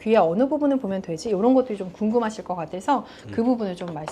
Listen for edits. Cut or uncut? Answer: uncut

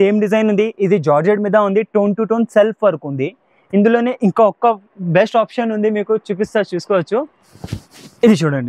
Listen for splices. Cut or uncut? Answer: uncut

